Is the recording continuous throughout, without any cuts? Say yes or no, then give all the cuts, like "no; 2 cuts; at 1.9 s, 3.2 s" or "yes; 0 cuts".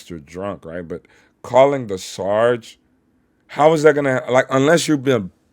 yes; 0 cuts